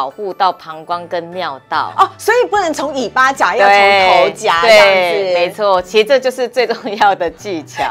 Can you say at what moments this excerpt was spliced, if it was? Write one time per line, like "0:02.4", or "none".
none